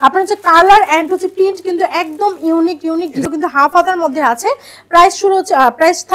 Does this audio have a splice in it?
yes; 1 cut; at 3.2 s

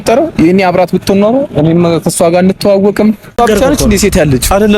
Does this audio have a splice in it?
yes; 1 cut; at 3.4 s

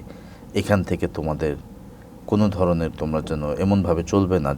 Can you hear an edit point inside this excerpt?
no; 0 cuts

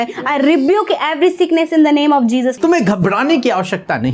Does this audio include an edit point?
yes; 1 cut; at 2.5 s

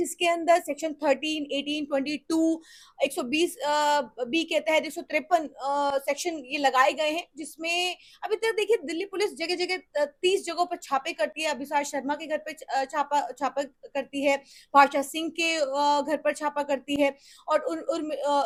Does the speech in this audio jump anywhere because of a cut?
no; 0 cuts

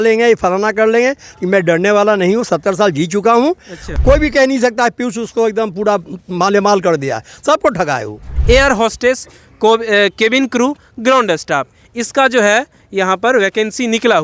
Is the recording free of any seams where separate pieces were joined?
no; 2 cuts; at 3.8 s, 8.3 s

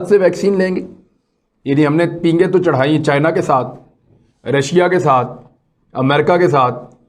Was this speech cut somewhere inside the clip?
no; 0 cuts

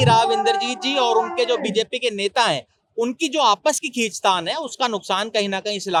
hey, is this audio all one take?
yes; 0 cuts

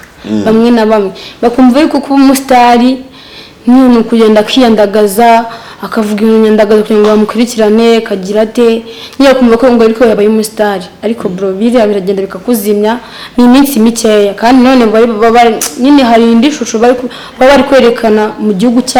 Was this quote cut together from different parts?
no; 0 cuts

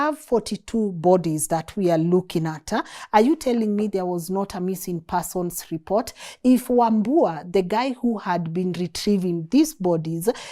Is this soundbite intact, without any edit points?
yes; 0 cuts

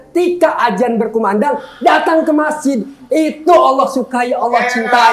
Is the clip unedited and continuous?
yes; 0 cuts

